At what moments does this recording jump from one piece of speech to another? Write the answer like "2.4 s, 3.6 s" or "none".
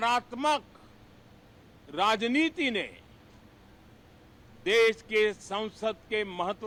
none